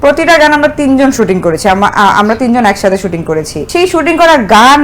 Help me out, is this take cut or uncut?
cut